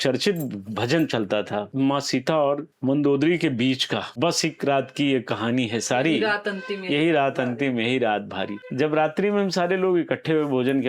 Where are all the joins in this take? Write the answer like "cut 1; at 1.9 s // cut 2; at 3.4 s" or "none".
cut 1; at 1.7 s // cut 2; at 2.7 s // cut 3; at 4.1 s // cut 4; at 8.6 s